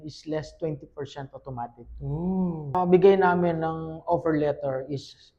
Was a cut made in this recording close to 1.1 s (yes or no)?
no